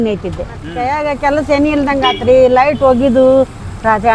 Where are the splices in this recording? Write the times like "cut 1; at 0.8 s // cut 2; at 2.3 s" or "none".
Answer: cut 1; at 1.0 s